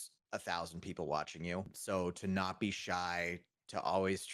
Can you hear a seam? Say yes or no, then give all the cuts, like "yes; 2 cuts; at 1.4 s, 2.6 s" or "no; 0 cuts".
yes; 1 cut; at 1.8 s